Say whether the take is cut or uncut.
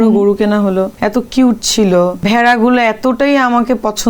cut